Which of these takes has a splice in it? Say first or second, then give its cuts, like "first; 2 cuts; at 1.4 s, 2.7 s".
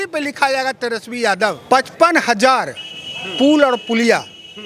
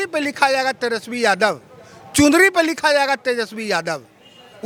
first; 1 cut; at 1.6 s